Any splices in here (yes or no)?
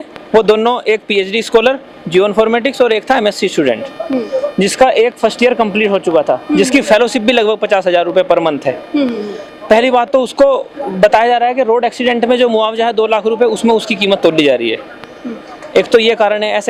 no